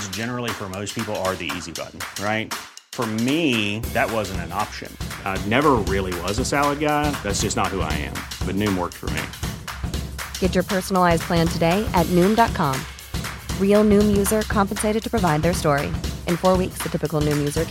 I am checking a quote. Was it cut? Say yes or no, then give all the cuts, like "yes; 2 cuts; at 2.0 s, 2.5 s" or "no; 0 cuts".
no; 0 cuts